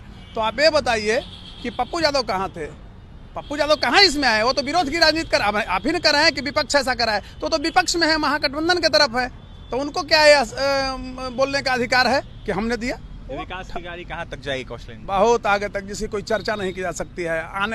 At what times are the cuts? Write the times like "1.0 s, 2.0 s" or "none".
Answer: none